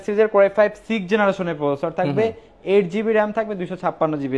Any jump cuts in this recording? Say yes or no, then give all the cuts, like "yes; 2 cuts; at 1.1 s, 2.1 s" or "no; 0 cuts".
no; 0 cuts